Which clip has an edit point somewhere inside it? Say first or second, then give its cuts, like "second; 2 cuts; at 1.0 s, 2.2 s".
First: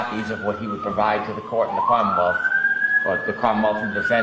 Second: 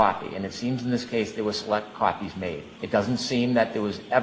second; 1 cut; at 2.7 s